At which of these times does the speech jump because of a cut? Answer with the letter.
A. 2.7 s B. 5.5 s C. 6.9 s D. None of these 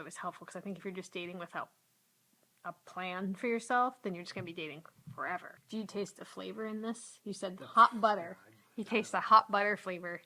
B